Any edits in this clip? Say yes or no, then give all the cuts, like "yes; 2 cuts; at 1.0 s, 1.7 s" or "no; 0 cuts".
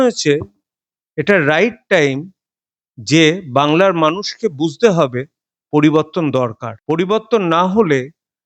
yes; 1 cut; at 6.7 s